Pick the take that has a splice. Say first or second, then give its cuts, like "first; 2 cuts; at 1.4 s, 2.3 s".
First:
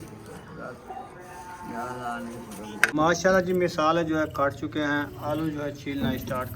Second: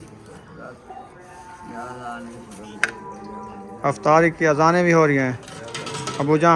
first; 1 cut; at 2.9 s